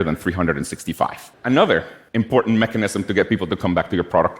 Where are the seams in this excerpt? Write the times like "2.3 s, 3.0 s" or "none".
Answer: 1.3 s, 2.0 s